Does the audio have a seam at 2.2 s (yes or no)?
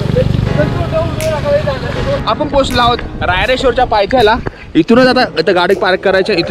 yes